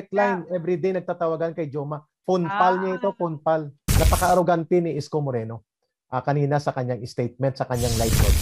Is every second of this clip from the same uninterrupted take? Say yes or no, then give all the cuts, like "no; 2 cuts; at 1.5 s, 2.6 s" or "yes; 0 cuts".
no; 1 cut; at 3.8 s